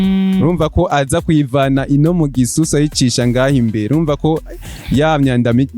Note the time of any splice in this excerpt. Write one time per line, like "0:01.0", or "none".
none

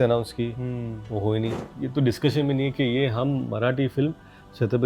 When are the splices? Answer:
0:01.6

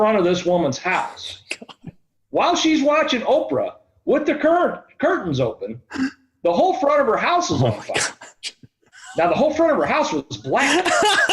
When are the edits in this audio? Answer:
0:09.0

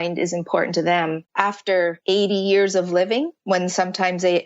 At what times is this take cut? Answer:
0:01.7
0:03.4

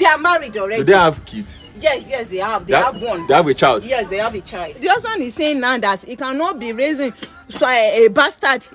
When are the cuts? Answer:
0:04.8

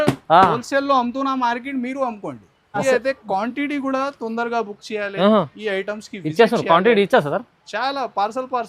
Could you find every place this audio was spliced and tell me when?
0:02.8

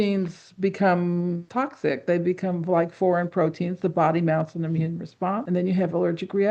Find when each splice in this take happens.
0:01.4
0:05.4

